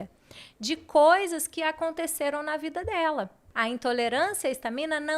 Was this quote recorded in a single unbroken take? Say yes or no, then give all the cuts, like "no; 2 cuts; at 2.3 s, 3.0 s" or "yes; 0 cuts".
no; 1 cut; at 3.5 s